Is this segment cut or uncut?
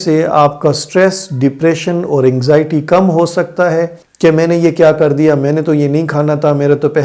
cut